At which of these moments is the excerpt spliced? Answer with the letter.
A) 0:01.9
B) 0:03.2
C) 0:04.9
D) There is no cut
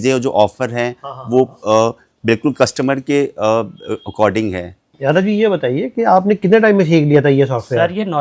C